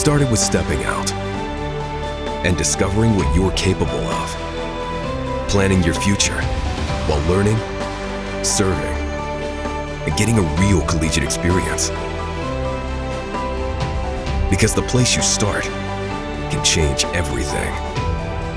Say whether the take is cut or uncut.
uncut